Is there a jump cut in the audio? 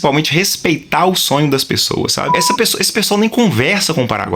yes; 1 cut; at 2.3 s

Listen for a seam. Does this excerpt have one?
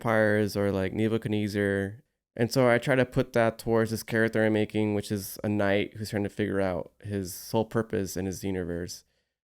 yes; 1 cut; at 2.0 s

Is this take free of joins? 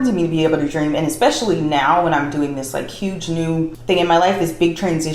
no; 1 cut; at 3.8 s

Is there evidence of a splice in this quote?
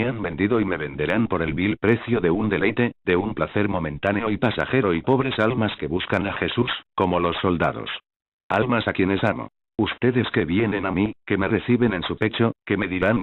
yes; 1 cut; at 8.3 s

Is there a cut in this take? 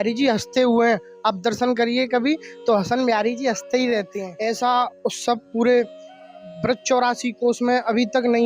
yes; 1 cut; at 4.2 s

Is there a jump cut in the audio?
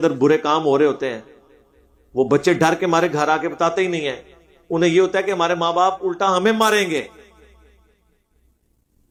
no; 0 cuts

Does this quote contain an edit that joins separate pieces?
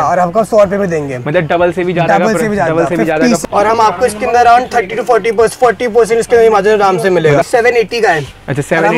yes; 2 cuts; at 3.4 s, 7.4 s

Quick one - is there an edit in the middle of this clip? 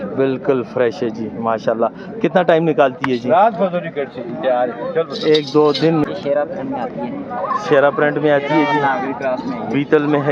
yes; 1 cut; at 6.0 s

